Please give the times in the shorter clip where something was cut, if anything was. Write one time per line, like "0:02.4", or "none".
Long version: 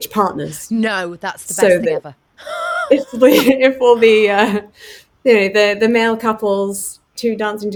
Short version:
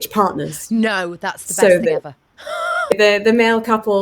0:02.9